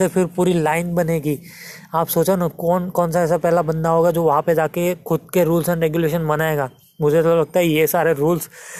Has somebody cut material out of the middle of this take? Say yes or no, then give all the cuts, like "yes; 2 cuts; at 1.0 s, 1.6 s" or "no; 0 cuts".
no; 0 cuts